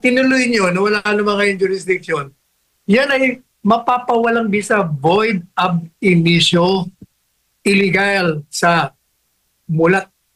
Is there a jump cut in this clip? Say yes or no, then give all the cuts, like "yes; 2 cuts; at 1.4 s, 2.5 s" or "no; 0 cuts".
no; 0 cuts